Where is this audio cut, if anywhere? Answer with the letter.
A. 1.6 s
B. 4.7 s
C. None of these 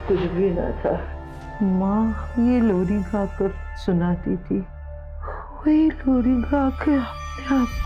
C